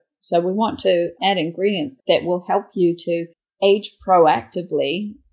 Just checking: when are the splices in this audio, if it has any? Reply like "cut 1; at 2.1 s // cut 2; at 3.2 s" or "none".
none

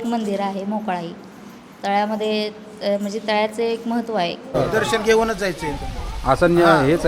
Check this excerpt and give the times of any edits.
cut 1; at 4.6 s

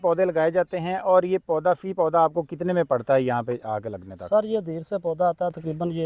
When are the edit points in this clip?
none

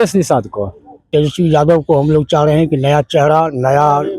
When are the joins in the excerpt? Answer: cut 1; at 1.0 s

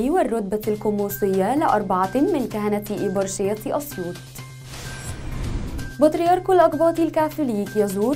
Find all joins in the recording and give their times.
cut 1; at 4.1 s // cut 2; at 5.8 s

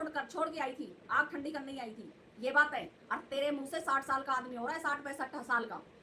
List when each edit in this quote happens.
cut 1; at 2.2 s

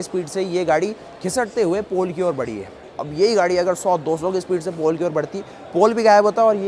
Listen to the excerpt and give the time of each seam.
none

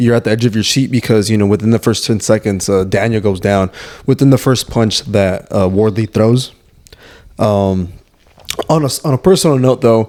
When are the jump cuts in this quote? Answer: none

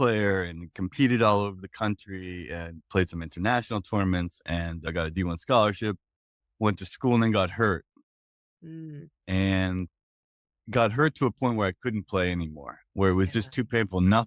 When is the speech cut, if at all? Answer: none

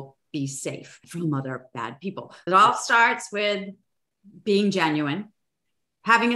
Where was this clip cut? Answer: cut 1; at 2.4 s

